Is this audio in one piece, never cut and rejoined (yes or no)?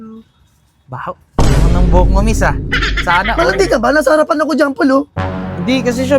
yes